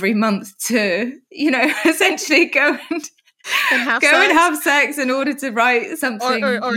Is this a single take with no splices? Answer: yes; 0 cuts

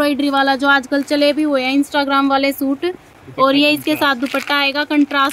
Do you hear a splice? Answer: no; 0 cuts

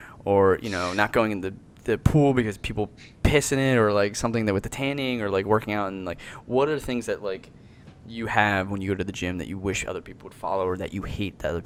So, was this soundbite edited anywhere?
no; 0 cuts

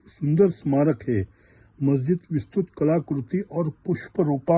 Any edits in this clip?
no; 0 cuts

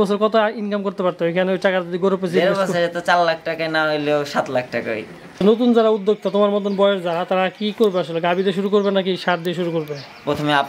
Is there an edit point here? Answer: yes; 1 cut; at 5.4 s

